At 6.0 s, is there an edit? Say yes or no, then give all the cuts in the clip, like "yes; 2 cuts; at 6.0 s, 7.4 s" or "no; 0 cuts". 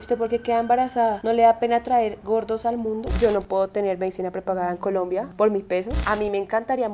yes; 2 cuts; at 3.1 s, 6.0 s